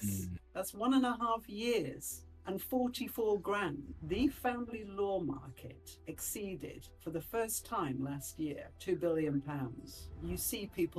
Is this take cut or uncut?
cut